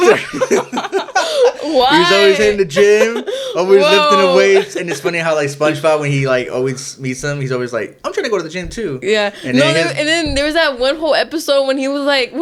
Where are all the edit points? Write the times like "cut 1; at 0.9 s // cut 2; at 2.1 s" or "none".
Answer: none